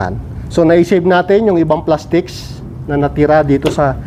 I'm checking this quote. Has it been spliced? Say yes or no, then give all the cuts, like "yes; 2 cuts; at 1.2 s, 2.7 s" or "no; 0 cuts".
no; 0 cuts